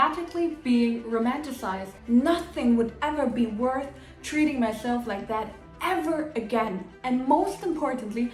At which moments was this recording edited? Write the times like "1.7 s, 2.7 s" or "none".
1.9 s, 6.9 s